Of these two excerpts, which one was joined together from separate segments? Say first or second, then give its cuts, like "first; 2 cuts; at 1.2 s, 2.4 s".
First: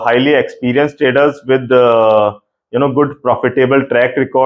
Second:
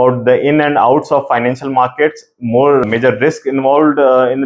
second; 1 cut; at 2.8 s